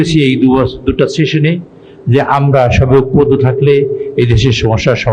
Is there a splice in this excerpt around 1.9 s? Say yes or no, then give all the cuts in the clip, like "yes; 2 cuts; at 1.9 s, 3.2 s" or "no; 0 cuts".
no; 0 cuts